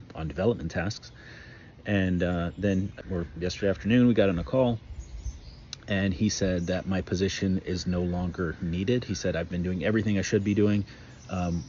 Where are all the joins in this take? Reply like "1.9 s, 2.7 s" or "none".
none